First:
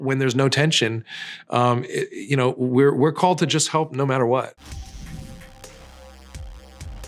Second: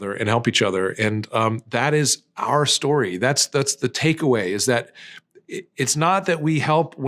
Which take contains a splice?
first; 1 cut; at 4.6 s

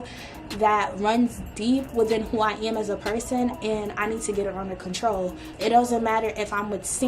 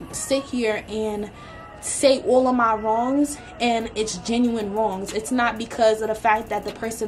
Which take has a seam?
first; 1 cut; at 5.4 s

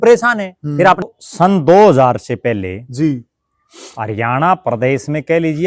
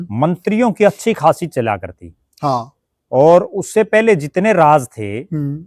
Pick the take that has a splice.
first; 1 cut; at 1.1 s

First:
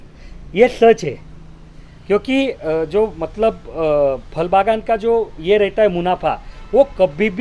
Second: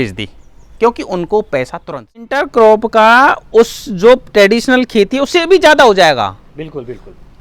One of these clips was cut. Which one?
second; 1 cut; at 2.4 s

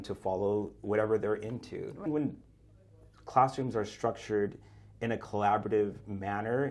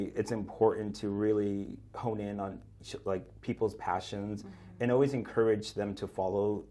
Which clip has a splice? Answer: first; 1 cut; at 2.1 s

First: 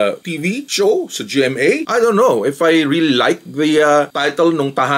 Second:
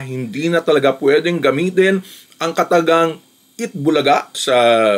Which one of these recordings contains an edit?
first; 1 cut; at 1.8 s

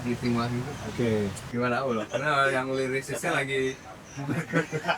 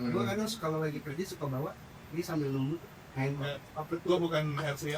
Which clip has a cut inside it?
first; 1 cut; at 1.4 s

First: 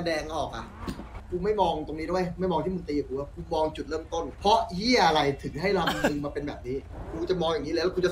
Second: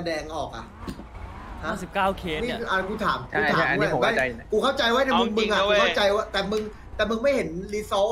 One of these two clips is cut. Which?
first; 2 cuts; at 1.2 s, 4.3 s

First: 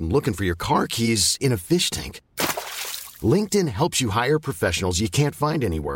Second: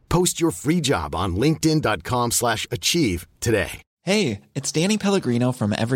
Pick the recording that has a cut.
second; 1 cut; at 3.9 s

